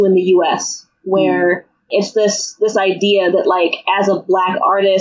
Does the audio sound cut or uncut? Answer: cut